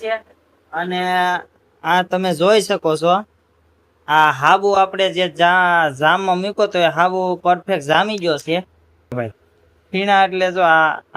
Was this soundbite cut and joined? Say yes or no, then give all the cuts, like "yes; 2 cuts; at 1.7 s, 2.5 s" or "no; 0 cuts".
yes; 1 cut; at 9.2 s